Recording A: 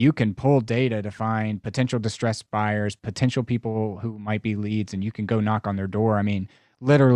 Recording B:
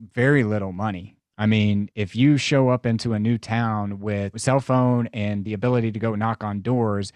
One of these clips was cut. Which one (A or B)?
B